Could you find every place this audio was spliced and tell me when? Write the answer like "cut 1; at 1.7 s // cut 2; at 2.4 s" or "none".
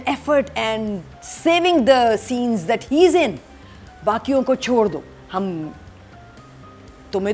none